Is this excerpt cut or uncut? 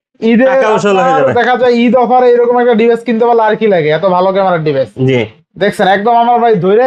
uncut